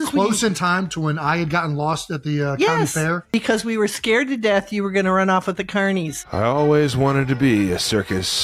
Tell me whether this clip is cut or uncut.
uncut